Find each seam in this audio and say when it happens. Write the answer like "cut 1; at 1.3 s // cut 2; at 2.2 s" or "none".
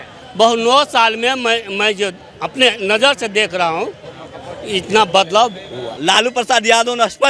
cut 1; at 5.9 s